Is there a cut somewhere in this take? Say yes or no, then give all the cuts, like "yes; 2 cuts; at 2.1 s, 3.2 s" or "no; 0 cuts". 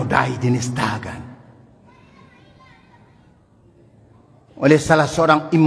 no; 0 cuts